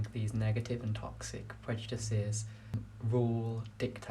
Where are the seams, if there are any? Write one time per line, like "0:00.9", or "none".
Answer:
0:02.7